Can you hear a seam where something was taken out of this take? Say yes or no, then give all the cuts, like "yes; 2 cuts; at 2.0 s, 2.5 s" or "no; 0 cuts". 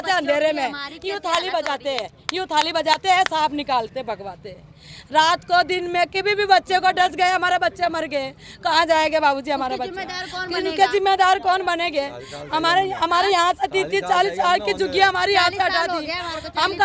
no; 0 cuts